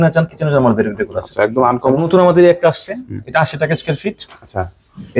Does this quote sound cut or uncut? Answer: cut